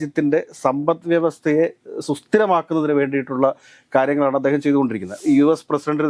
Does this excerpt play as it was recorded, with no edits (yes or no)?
no